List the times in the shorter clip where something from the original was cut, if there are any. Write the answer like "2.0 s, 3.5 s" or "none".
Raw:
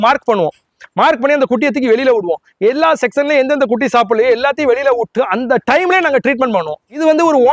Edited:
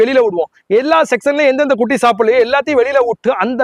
none